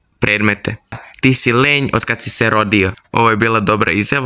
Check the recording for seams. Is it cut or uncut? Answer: cut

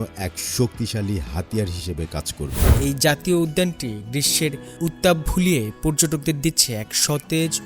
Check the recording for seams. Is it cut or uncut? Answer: cut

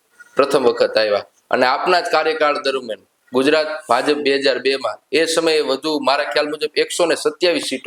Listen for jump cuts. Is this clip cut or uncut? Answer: uncut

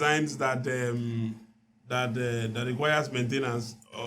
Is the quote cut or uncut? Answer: uncut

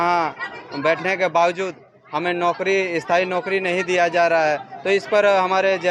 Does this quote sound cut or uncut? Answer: uncut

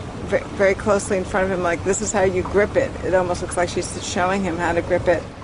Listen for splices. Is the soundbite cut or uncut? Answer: uncut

